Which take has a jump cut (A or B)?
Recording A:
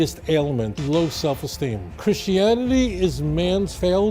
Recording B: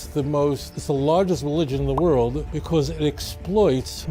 A